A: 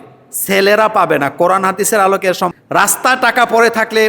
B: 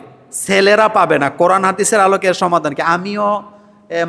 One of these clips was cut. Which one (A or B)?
A